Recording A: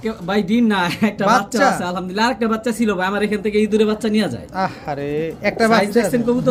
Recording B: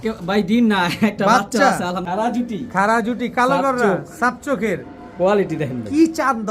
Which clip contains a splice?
B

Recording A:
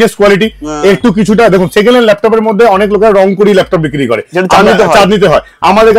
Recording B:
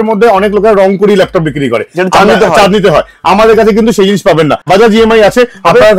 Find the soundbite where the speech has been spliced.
B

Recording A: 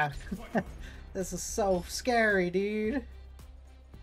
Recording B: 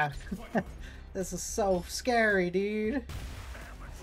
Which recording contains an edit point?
B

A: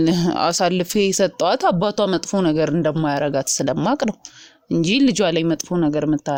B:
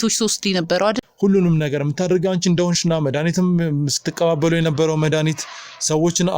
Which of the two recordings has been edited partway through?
B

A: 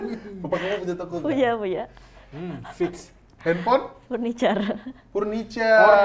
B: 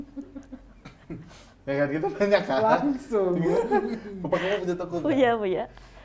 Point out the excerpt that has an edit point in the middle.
A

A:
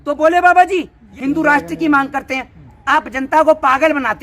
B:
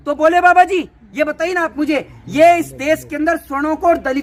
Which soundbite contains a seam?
A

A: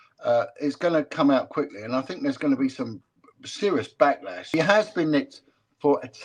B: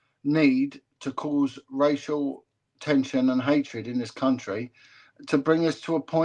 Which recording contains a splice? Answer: A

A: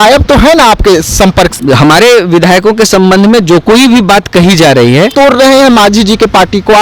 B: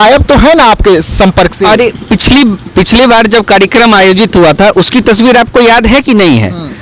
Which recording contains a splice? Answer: A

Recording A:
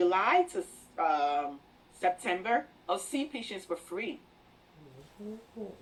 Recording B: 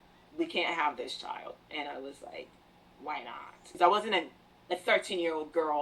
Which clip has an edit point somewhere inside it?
B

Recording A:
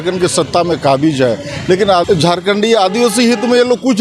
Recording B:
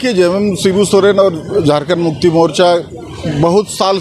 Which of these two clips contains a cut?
A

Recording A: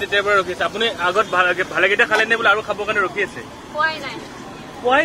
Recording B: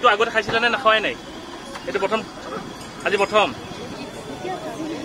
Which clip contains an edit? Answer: B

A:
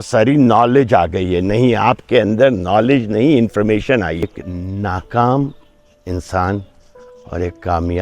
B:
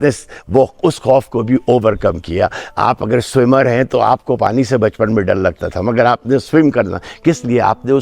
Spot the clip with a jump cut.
A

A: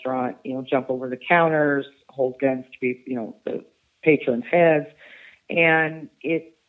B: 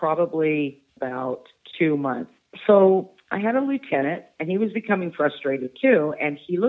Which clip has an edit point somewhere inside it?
B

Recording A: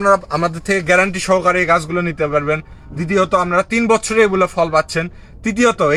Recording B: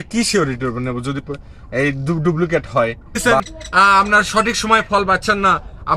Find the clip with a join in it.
B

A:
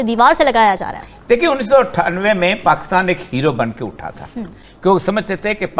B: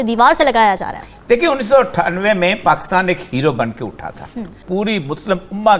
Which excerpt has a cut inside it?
B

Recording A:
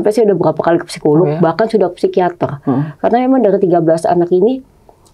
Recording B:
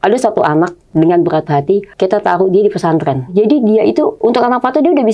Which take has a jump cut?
B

